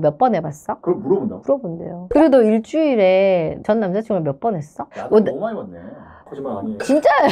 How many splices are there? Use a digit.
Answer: 3